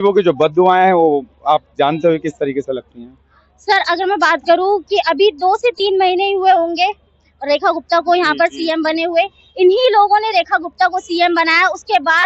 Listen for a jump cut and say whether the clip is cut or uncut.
uncut